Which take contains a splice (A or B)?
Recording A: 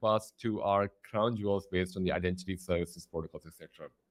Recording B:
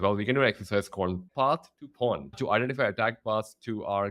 B